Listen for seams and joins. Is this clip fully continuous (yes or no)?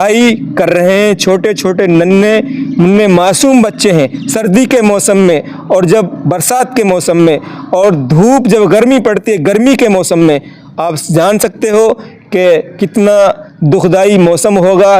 yes